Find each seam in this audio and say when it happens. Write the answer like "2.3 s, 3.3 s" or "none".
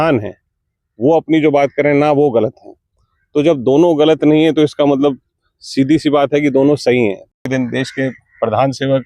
7.4 s